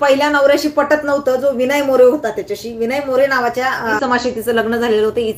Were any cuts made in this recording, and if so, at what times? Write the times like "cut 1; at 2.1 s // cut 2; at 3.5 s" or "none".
cut 1; at 4.0 s